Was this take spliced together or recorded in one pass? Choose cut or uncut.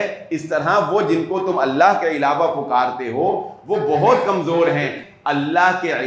cut